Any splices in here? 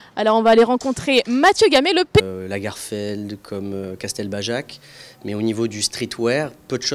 no; 0 cuts

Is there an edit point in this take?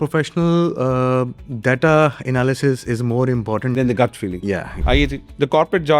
yes; 1 cut; at 4.7 s

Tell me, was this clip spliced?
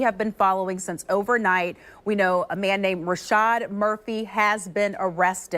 no; 0 cuts

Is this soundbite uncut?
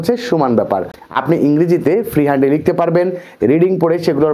no; 1 cut; at 1.0 s

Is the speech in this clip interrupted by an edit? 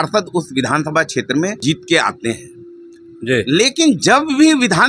yes; 1 cut; at 1.6 s

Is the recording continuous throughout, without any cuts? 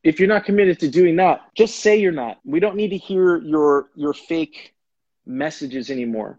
no; 2 cuts; at 1.5 s, 2.3 s

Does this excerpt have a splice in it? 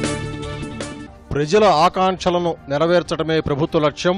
no; 0 cuts

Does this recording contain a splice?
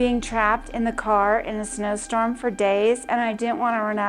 yes; 1 cut; at 3.0 s

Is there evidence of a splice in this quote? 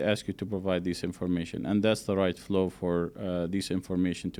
no; 0 cuts

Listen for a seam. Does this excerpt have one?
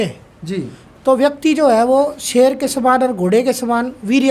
no; 0 cuts

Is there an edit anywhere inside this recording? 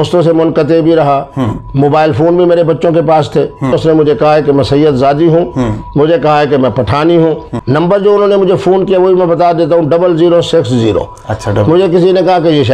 yes; 2 cuts; at 3.8 s, 7.5 s

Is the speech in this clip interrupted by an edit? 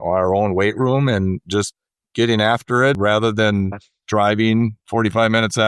yes; 3 cuts; at 1.4 s, 3.0 s, 4.8 s

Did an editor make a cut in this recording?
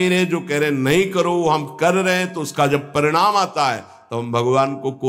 no; 0 cuts

